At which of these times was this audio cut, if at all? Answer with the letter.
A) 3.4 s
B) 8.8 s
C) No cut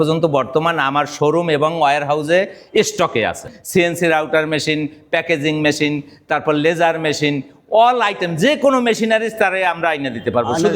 A